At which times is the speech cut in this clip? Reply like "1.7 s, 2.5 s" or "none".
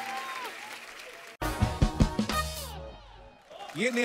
1.4 s